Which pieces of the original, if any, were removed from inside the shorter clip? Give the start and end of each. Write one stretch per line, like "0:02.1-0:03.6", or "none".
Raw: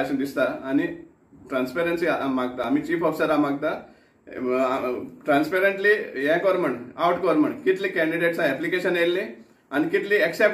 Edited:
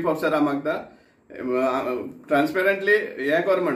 none